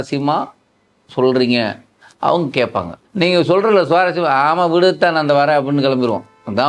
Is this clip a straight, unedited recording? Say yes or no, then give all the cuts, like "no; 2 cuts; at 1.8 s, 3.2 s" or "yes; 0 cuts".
no; 1 cut; at 3.0 s